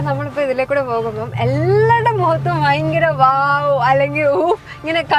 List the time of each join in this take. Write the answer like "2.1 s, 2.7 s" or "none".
none